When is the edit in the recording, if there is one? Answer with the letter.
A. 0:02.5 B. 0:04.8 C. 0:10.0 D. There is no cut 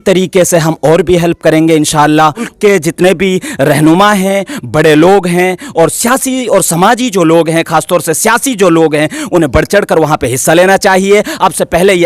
A